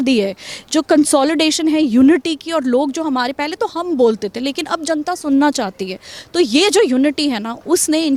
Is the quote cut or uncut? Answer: uncut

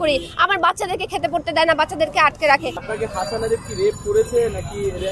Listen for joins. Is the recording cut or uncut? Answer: cut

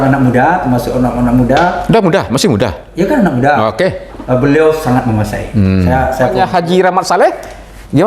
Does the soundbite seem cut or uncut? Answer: cut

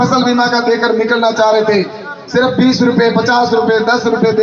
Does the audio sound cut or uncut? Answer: uncut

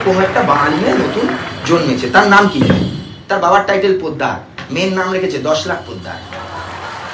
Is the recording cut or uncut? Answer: cut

